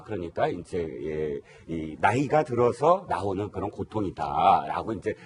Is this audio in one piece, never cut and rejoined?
yes; 0 cuts

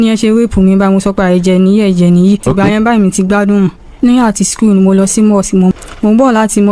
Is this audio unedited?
no; 3 cuts; at 2.5 s, 3.8 s, 5.7 s

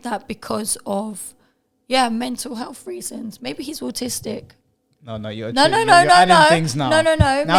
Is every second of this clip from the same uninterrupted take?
yes; 0 cuts

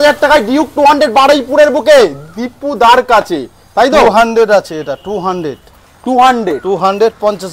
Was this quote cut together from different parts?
no; 0 cuts

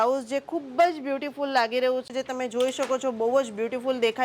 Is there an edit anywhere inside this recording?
yes; 1 cut; at 2.1 s

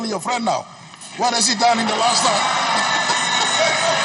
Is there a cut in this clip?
no; 0 cuts

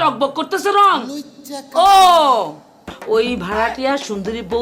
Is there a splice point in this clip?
yes; 1 cut; at 2.9 s

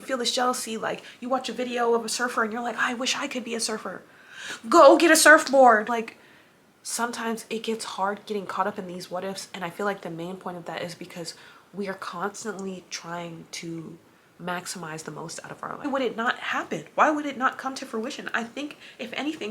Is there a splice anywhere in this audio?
yes; 2 cuts; at 5.9 s, 15.8 s

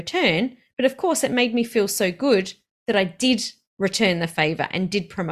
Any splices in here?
no; 0 cuts

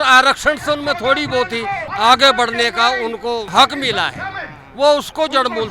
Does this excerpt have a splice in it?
yes; 2 cuts; at 1.9 s, 3.5 s

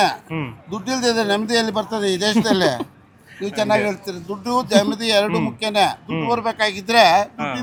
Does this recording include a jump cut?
no; 0 cuts

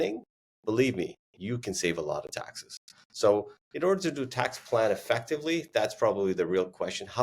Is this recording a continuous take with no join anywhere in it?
yes; 0 cuts

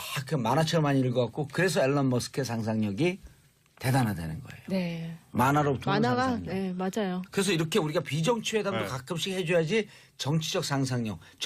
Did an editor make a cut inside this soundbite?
yes; 1 cut; at 6.5 s

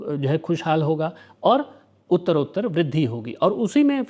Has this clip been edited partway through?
no; 0 cuts

